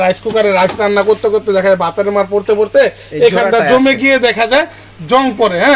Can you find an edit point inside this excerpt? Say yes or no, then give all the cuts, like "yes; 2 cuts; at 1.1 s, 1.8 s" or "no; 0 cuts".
no; 0 cuts